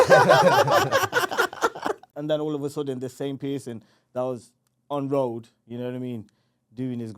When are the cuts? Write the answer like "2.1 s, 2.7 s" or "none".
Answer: 2.0 s